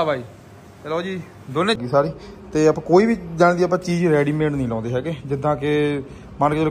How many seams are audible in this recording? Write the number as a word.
one